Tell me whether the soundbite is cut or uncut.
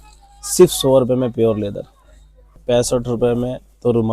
cut